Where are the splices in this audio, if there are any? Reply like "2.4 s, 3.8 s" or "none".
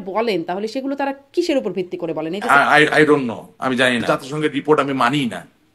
2.4 s, 4.0 s